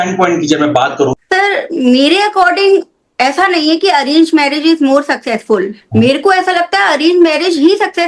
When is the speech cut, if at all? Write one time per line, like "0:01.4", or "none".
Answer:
0:01.1